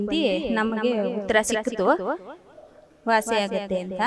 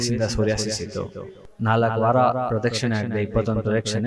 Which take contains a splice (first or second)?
second